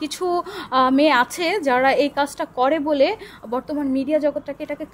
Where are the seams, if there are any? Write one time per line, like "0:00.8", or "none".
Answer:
none